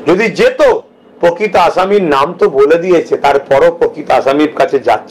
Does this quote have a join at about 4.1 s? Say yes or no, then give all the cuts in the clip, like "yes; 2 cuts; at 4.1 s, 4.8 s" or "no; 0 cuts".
no; 0 cuts